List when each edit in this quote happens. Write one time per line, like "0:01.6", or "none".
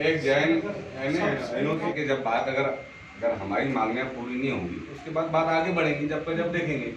0:01.9